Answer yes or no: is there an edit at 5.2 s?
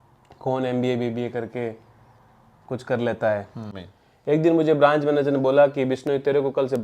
no